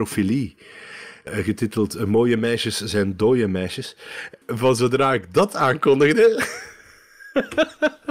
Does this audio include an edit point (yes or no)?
yes